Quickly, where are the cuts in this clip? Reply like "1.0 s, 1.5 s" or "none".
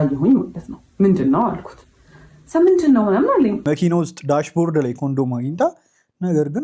3.6 s